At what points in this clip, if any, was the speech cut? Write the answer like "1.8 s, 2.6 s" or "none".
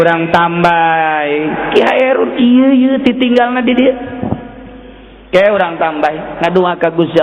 none